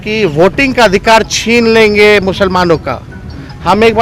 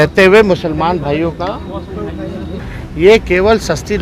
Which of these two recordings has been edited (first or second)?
second